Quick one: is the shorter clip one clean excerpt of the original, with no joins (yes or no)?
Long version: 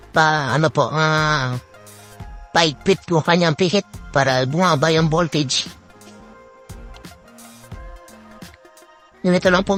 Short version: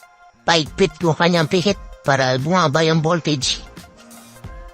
no